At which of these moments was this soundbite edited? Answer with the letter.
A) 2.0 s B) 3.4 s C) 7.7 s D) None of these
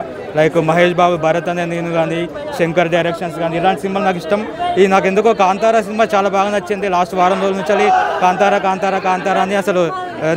D